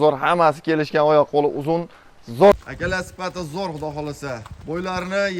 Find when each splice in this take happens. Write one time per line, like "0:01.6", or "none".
0:02.5